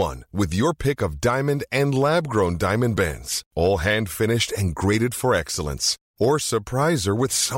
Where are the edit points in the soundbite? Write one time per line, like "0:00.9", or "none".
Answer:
none